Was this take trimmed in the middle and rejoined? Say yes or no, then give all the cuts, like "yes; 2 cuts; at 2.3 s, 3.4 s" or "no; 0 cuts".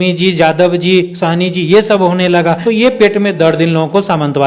yes; 1 cut; at 2.6 s